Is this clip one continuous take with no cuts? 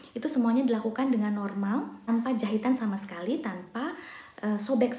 no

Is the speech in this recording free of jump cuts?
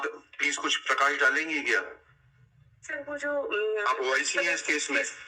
yes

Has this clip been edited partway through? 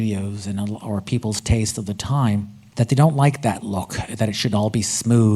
yes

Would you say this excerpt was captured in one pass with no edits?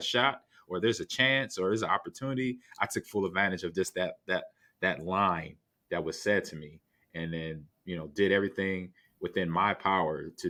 yes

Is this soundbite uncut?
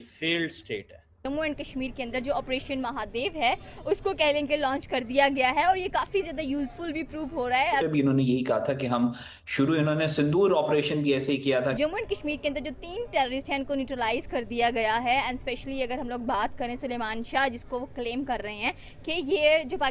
no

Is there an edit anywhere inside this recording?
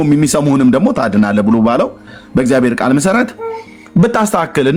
no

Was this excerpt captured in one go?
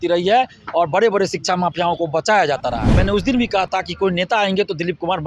no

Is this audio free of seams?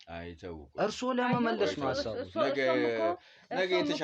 yes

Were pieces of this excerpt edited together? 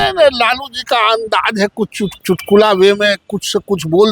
yes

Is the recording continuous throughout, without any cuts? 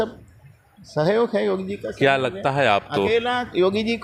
yes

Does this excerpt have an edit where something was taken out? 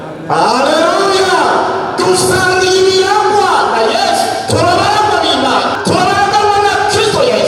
yes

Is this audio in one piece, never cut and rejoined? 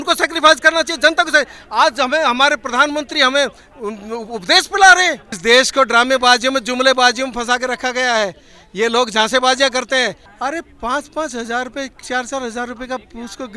no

